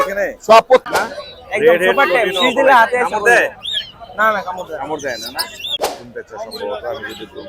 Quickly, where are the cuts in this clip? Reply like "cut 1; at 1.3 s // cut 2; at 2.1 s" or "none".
cut 1; at 0.8 s // cut 2; at 5.9 s

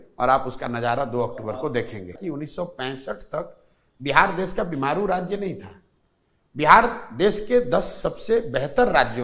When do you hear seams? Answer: cut 1; at 2.1 s

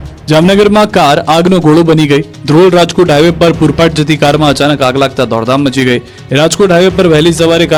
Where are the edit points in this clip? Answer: none

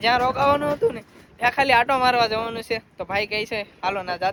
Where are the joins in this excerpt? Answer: none

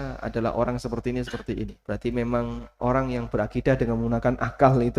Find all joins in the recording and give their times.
cut 1; at 1.8 s

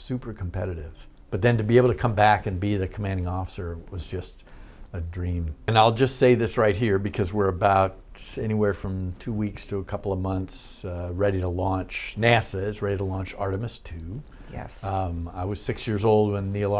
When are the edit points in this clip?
cut 1; at 5.7 s

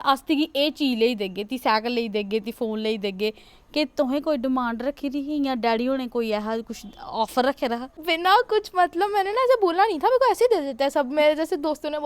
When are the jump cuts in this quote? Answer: cut 1; at 8.0 s

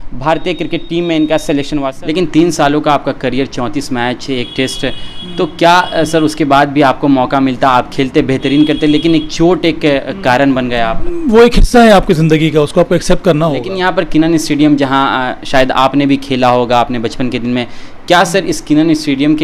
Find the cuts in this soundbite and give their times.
cut 1; at 1.8 s // cut 2; at 11.1 s // cut 3; at 13.7 s

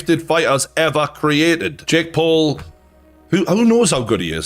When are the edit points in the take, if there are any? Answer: cut 1; at 1.7 s

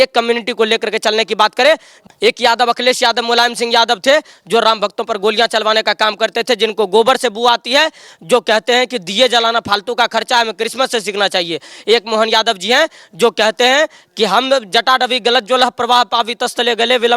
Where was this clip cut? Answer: cut 1; at 1.9 s

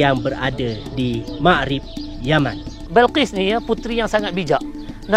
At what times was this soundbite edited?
cut 1; at 2.8 s

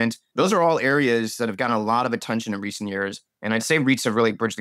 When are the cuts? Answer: none

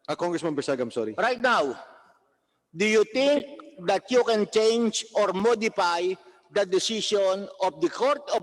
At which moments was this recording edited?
none

